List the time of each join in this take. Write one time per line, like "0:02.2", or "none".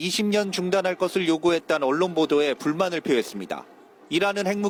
none